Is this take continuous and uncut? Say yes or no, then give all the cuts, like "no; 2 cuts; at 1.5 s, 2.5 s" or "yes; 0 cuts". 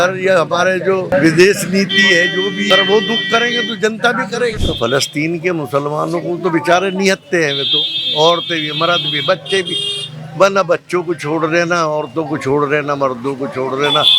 no; 3 cuts; at 1.1 s, 2.7 s, 4.6 s